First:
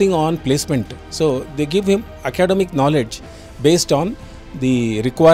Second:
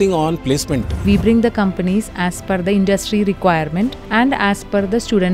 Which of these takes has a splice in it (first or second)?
second